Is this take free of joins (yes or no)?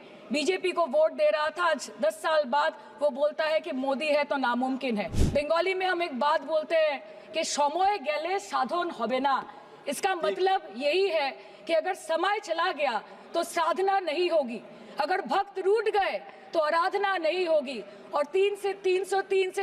no